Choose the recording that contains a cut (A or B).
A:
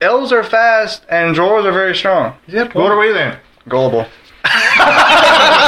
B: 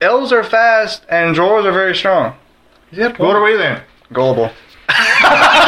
A